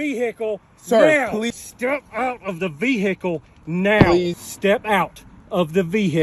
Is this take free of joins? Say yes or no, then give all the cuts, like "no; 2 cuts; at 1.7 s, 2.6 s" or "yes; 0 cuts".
no; 2 cuts; at 1.5 s, 4.3 s